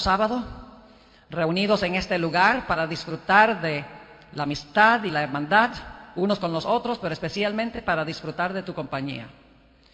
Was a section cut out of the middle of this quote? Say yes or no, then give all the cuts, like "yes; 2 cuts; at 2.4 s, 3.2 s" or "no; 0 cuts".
yes; 1 cut; at 1.2 s